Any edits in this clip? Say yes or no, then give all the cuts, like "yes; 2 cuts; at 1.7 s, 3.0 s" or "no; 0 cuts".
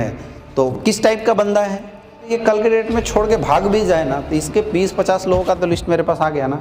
yes; 1 cut; at 2.3 s